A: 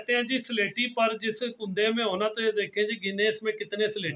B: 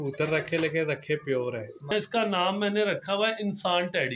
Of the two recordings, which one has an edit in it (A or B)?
B